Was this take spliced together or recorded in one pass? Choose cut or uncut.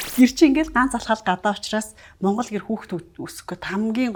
uncut